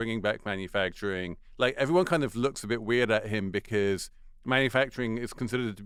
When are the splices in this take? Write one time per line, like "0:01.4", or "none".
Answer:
none